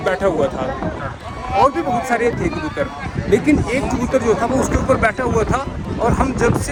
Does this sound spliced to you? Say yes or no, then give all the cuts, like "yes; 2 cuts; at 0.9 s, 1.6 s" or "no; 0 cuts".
no; 0 cuts